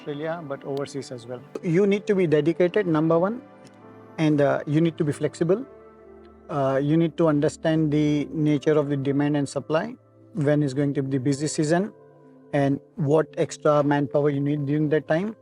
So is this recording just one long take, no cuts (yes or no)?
no